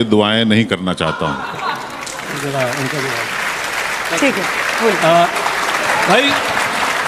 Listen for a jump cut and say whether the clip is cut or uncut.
uncut